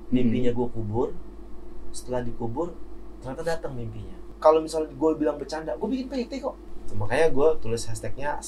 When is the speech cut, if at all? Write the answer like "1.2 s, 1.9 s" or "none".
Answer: 4.3 s, 6.7 s